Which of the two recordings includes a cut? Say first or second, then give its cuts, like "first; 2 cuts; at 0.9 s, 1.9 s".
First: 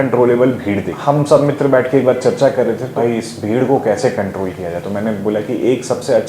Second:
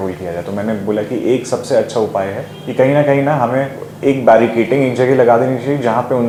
first; 2 cuts; at 0.9 s, 2.9 s